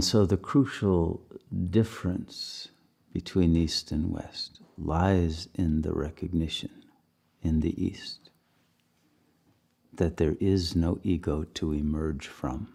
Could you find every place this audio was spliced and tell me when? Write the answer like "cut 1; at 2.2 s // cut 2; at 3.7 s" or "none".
none